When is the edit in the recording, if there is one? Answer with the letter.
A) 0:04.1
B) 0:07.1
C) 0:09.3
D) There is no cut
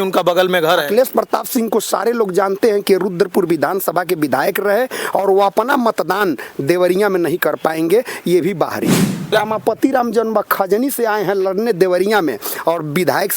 C